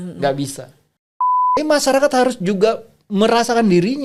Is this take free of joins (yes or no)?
no